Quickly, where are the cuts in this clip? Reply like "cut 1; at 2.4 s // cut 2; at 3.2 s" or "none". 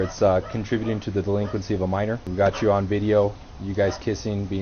cut 1; at 2.3 s